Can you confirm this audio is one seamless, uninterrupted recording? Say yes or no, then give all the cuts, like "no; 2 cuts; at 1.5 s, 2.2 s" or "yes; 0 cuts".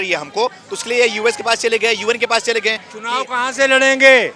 yes; 0 cuts